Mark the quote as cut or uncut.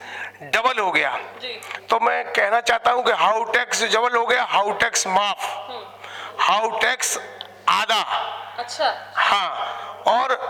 uncut